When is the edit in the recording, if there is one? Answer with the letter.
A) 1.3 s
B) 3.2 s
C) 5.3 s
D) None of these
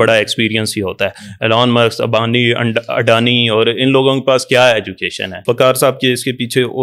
C